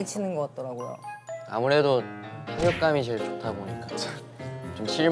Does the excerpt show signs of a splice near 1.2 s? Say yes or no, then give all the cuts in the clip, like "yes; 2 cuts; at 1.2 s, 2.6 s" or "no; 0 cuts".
yes; 1 cut; at 1.2 s